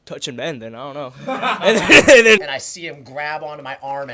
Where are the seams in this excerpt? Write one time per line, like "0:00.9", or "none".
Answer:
0:02.5